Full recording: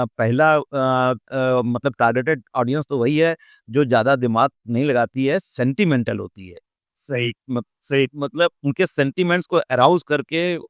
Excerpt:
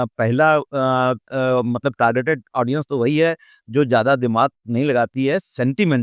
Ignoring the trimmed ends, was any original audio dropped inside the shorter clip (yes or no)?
no